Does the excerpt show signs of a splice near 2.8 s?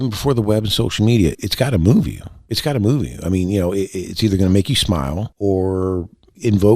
no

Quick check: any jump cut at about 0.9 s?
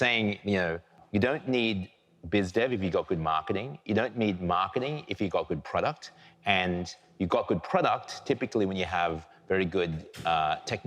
yes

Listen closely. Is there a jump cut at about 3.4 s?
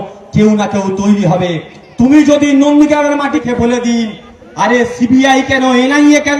yes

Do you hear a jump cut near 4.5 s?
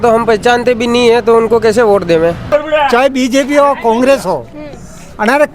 no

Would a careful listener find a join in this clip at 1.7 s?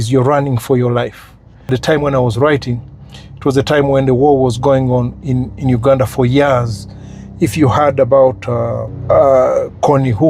yes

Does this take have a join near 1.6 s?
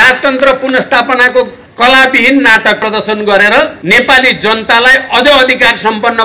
yes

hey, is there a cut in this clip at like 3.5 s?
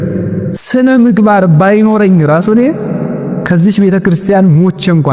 no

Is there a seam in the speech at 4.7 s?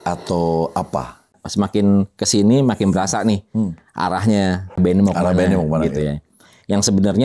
yes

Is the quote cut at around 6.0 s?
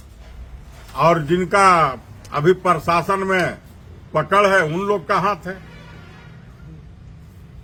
no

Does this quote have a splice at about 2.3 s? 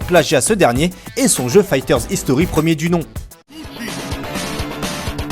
yes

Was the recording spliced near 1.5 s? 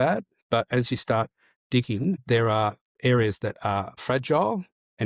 no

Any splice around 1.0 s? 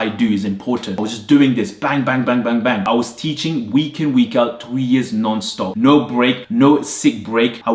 yes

